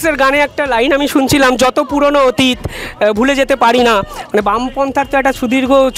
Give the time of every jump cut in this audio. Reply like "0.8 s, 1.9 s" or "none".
none